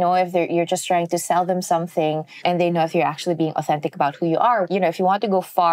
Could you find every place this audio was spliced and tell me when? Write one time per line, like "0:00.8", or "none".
0:02.3
0:04.6